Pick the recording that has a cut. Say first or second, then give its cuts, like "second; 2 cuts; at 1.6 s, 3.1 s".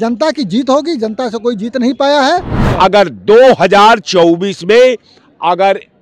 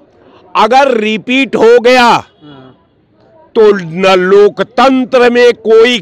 first; 1 cut; at 2.6 s